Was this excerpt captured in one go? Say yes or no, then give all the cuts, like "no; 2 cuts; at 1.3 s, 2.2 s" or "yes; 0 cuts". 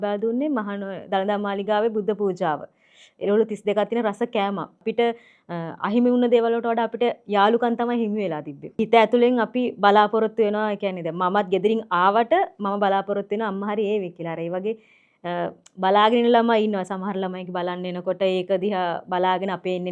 no; 2 cuts; at 4.8 s, 8.8 s